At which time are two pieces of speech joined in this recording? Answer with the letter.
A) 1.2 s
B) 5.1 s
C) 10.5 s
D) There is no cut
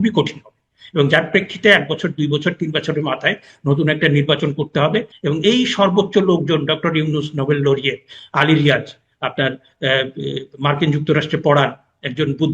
B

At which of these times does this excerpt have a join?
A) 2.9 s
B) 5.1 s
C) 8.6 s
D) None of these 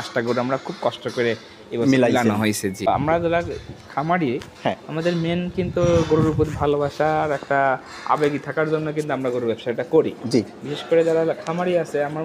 A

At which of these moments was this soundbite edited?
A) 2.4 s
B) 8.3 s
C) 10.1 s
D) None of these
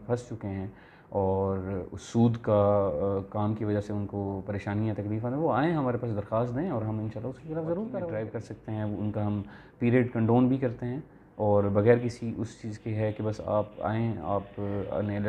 B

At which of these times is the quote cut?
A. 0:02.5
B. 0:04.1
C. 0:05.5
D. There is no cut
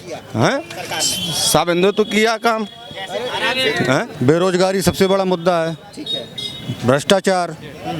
B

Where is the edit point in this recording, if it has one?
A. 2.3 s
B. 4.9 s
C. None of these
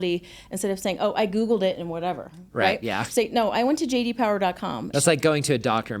B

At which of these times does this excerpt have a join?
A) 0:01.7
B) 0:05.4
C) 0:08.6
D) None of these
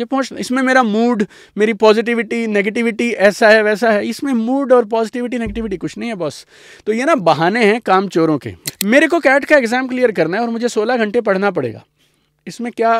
C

